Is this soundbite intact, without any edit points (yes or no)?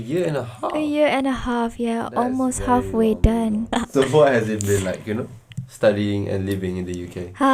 yes